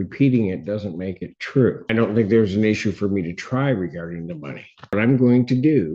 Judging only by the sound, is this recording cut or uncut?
cut